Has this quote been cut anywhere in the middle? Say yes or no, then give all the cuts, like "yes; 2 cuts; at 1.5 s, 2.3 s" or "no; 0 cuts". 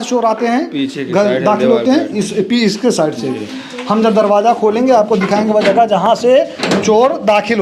no; 0 cuts